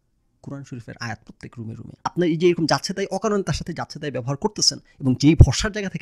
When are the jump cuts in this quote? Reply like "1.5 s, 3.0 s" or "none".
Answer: 2.1 s